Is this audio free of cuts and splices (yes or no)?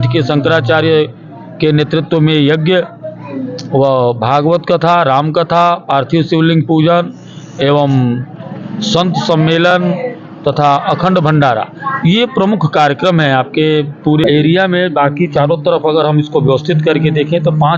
no